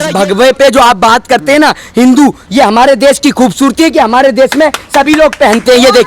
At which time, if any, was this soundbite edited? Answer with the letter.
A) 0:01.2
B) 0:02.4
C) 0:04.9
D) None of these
B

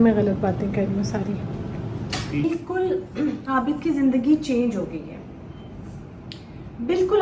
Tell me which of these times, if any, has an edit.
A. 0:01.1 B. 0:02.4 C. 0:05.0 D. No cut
B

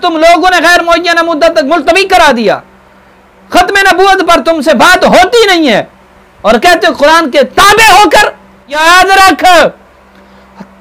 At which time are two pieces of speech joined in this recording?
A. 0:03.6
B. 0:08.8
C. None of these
B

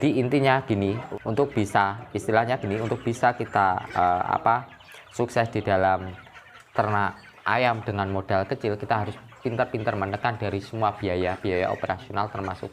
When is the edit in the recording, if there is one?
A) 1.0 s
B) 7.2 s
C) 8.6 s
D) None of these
A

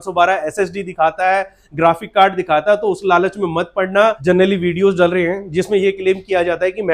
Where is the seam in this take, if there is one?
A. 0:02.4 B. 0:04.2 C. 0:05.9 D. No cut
B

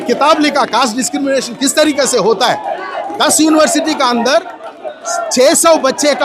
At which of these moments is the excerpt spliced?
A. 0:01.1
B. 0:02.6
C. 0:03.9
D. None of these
D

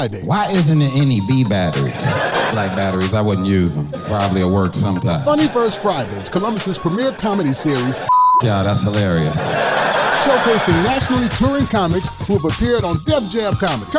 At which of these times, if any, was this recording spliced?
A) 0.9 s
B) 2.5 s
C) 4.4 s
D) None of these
B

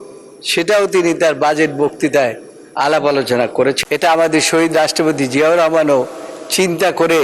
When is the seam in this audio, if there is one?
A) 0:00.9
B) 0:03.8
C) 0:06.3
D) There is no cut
B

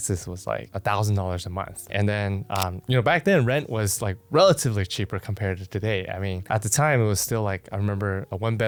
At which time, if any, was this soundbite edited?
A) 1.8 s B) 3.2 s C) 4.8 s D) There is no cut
D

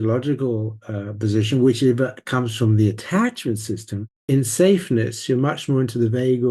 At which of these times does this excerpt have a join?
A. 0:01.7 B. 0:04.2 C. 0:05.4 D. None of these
B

